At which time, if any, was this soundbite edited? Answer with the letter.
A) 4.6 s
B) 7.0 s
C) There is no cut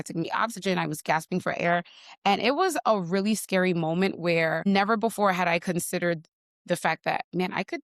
A